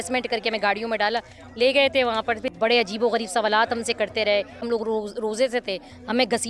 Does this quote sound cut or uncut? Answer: cut